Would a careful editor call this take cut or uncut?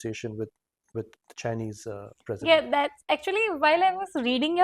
cut